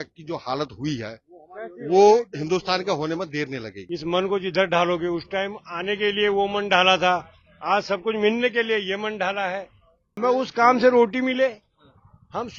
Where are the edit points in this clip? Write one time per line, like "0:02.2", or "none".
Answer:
0:03.7
0:10.2